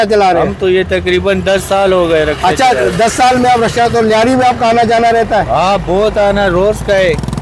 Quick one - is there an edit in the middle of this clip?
no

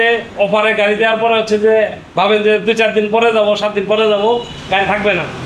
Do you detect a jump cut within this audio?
no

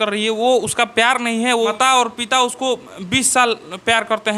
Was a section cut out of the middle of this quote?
yes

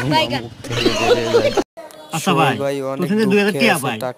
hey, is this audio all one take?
no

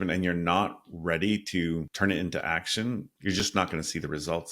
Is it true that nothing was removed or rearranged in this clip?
no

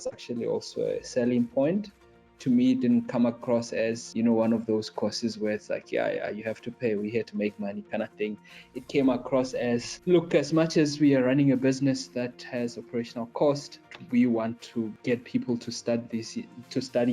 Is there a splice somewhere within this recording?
yes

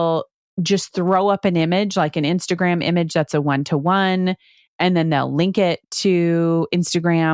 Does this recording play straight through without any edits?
yes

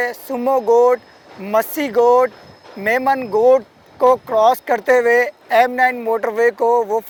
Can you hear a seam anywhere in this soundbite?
no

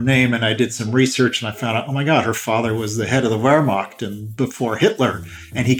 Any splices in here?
no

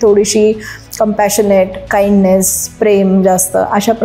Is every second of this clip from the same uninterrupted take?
yes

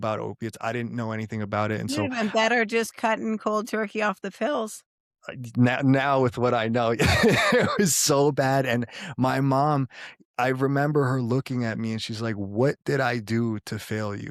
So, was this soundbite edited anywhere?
no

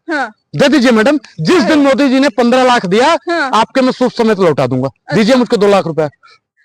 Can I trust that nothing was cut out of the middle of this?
yes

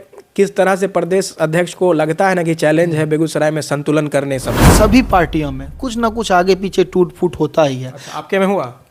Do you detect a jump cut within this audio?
yes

